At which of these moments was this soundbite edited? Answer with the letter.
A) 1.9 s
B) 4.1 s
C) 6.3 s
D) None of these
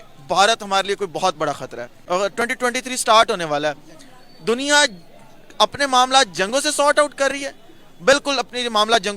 A